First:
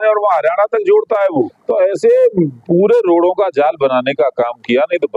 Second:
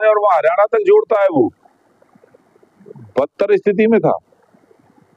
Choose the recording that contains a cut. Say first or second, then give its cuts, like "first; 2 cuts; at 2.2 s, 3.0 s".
first; 1 cut; at 1.6 s